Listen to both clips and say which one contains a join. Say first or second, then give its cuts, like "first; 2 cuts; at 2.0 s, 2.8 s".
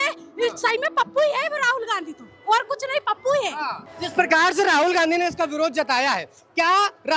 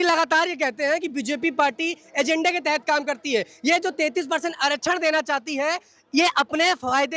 first; 1 cut; at 3.9 s